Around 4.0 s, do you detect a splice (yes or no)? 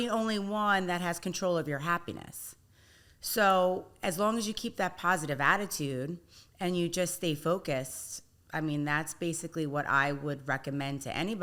no